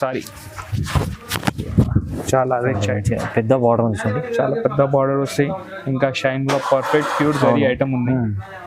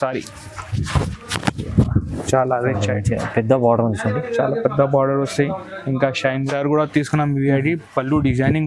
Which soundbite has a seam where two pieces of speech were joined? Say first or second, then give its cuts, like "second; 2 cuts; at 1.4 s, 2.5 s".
second; 1 cut; at 6.4 s